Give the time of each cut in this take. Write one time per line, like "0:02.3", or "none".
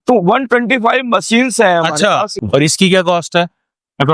0:02.3